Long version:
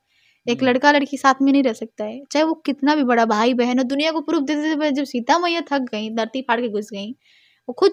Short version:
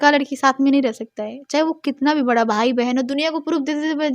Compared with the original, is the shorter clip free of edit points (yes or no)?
yes